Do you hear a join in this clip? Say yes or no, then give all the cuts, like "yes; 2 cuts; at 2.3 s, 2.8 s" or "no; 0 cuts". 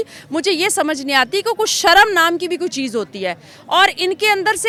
no; 0 cuts